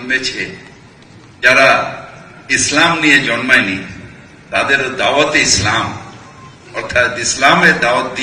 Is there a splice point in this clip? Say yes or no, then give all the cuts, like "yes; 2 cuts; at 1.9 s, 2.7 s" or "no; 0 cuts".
no; 0 cuts